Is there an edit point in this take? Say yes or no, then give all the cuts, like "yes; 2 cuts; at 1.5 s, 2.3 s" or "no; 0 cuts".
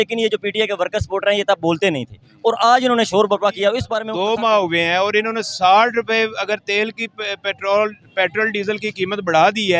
yes; 1 cut; at 4.0 s